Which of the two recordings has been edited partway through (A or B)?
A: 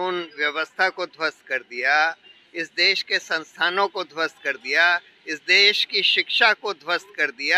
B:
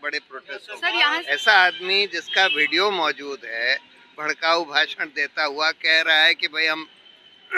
B